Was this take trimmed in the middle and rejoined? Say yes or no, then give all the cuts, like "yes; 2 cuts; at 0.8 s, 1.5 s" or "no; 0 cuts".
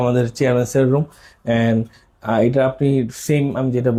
no; 0 cuts